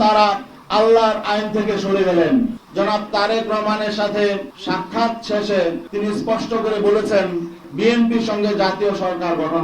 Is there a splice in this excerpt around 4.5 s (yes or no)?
yes